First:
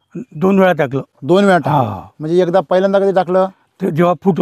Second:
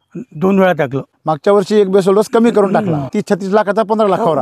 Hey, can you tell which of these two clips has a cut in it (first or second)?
second